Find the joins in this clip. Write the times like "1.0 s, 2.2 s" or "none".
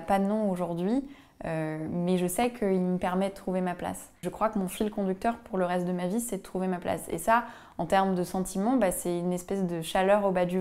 4.2 s